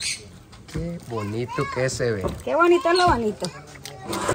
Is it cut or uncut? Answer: uncut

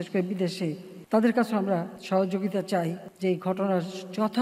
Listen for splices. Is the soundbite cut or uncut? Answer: cut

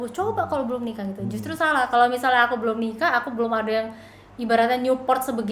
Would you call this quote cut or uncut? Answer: uncut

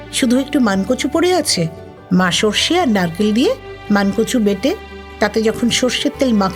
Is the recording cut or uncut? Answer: uncut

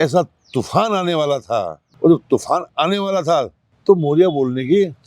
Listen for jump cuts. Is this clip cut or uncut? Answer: cut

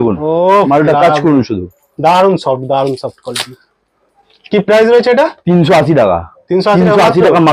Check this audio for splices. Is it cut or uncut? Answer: uncut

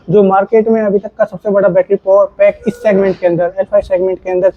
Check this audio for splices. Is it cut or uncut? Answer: uncut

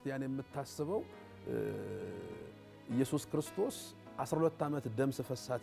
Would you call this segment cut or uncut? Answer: uncut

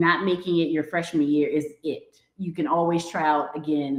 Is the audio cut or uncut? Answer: uncut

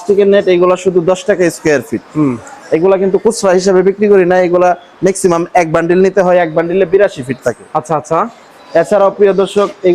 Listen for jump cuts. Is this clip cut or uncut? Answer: uncut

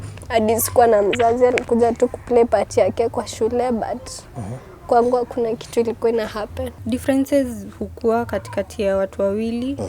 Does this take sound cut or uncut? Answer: cut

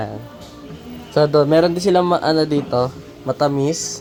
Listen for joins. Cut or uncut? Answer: uncut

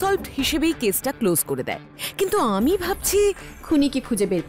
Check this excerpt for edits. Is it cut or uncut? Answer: uncut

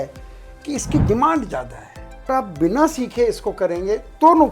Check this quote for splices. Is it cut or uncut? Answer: cut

